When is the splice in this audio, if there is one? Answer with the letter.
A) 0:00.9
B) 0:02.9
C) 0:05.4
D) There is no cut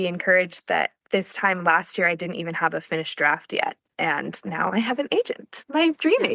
D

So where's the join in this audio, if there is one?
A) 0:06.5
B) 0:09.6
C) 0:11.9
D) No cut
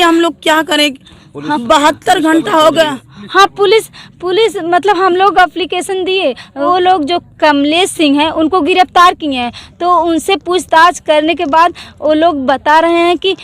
A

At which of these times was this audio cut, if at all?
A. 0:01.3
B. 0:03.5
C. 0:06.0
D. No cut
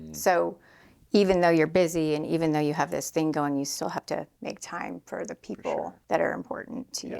C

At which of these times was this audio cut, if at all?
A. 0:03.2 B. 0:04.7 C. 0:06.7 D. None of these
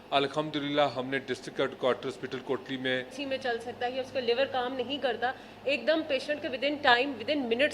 A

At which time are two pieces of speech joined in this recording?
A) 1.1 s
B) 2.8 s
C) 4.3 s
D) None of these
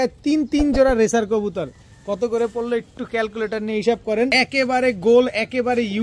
C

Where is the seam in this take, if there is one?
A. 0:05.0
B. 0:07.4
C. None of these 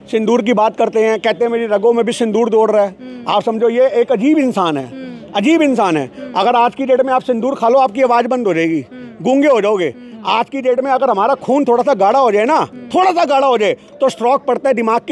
C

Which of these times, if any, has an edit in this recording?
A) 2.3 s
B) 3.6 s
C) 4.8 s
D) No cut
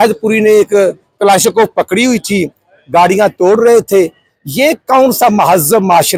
D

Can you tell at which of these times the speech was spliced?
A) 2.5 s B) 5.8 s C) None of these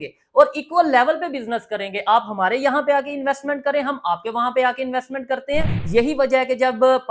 B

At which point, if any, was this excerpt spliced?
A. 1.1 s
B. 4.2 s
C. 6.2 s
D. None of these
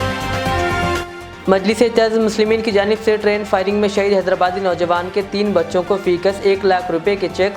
A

